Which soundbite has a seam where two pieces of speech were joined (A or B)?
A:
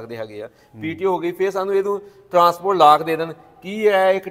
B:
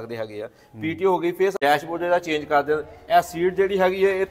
B